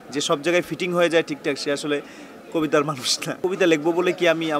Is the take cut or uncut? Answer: cut